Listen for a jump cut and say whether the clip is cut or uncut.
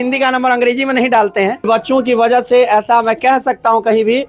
cut